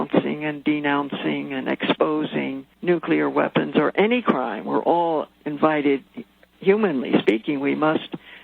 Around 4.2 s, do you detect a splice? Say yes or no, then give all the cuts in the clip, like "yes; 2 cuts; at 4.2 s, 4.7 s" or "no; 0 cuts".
no; 2 cuts; at 2.6 s, 5.4 s